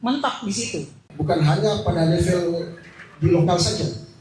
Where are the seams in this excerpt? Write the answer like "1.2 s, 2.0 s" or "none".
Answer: 1.0 s